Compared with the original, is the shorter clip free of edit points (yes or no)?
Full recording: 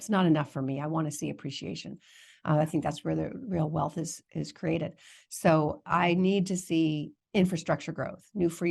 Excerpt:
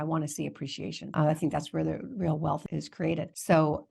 no